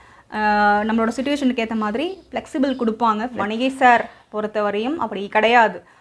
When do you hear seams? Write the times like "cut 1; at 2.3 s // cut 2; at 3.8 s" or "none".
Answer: cut 1; at 3.4 s